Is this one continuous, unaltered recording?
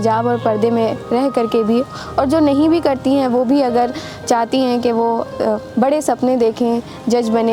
yes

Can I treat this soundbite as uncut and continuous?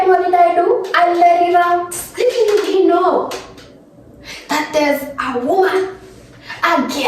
no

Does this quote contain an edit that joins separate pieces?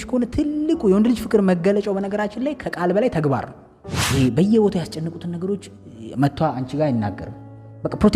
yes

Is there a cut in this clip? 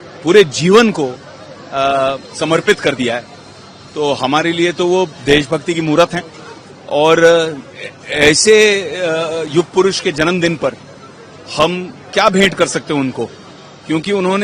no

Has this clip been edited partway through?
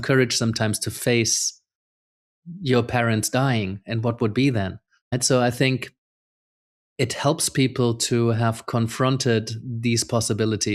yes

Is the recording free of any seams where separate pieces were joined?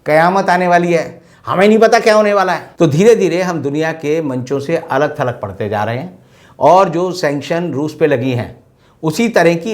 no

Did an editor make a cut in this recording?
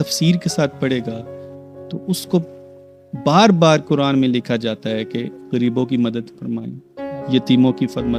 no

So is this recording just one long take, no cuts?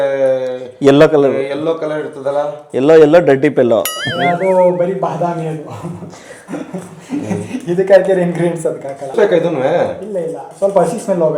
no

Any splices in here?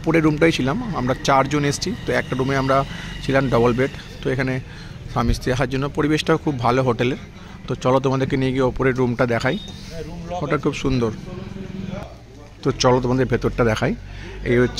no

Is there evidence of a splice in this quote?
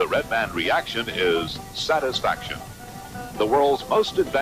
yes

